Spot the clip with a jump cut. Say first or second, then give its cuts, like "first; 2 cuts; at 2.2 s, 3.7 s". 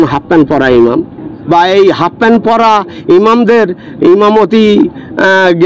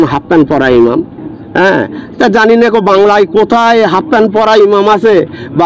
first; 1 cut; at 1.3 s